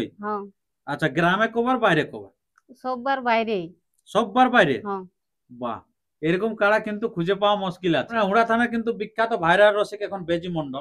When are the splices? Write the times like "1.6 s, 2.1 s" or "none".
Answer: 8.1 s